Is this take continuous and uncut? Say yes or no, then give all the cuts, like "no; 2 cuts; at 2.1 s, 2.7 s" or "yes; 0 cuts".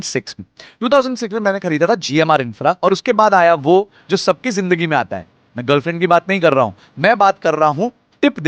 no; 1 cut; at 2.8 s